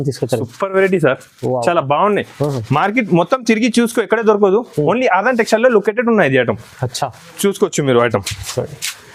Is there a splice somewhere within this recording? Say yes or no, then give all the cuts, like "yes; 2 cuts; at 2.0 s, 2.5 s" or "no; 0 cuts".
no; 0 cuts